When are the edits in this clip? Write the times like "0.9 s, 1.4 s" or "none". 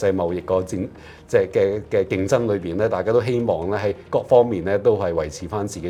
none